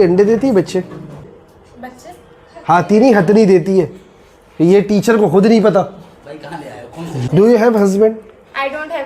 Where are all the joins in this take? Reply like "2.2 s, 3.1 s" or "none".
7.2 s